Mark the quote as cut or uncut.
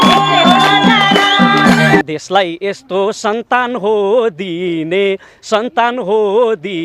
cut